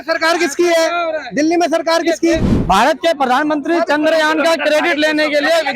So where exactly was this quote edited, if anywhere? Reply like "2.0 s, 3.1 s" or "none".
2.5 s